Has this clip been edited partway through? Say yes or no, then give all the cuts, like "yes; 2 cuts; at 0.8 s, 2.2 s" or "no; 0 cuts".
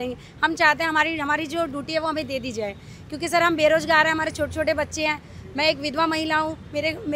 no; 0 cuts